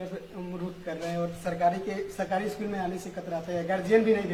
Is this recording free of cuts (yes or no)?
yes